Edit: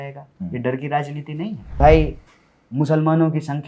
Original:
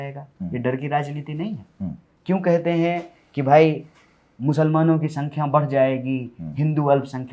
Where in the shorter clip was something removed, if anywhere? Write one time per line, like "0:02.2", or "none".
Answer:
0:01.8